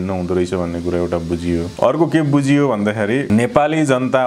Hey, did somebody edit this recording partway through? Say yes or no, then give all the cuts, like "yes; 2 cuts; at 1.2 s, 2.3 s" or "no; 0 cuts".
yes; 2 cuts; at 1.7 s, 3.2 s